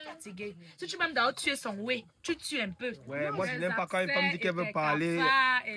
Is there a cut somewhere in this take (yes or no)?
yes